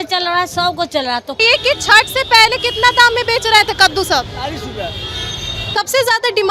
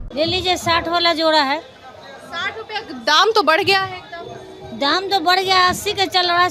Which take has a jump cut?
first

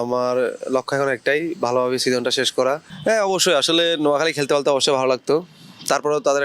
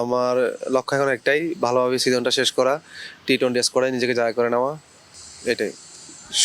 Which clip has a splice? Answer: first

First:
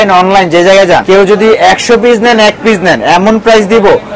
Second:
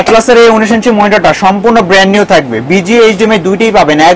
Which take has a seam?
first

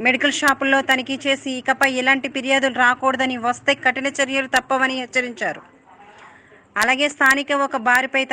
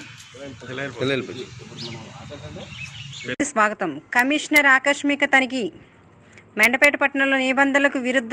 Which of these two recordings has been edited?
second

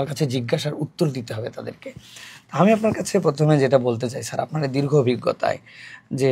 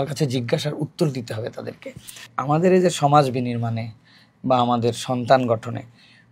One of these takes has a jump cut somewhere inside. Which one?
second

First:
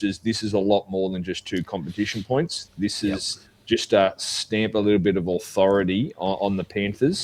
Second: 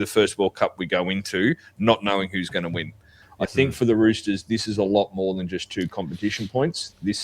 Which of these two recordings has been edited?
second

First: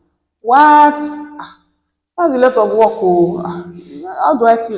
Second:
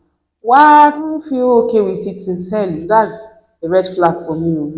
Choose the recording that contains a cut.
second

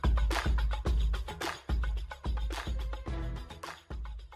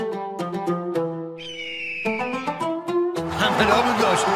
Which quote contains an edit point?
second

